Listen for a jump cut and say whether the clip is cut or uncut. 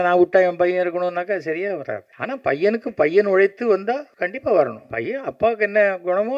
cut